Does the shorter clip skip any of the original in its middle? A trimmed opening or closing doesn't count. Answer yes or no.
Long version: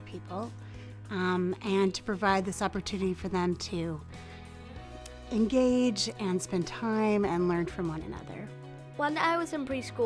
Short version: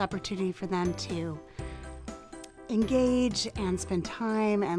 no